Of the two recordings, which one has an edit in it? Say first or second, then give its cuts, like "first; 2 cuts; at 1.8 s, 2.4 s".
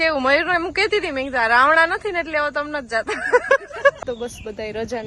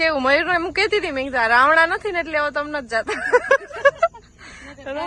first; 1 cut; at 4.0 s